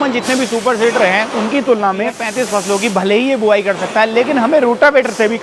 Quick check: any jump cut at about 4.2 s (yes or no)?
no